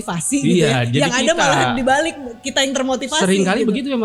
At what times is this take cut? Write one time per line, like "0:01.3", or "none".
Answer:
none